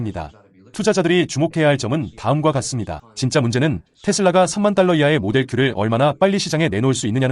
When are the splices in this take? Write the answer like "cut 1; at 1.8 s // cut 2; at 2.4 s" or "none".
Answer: cut 1; at 3.0 s